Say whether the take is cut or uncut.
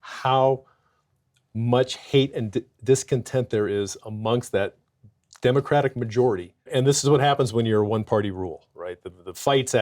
cut